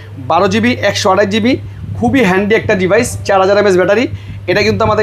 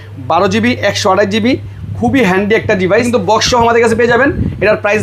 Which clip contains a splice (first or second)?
second